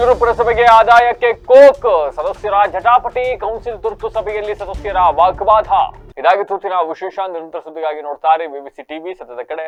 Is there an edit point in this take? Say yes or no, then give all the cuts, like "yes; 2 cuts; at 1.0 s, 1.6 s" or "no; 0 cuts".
no; 0 cuts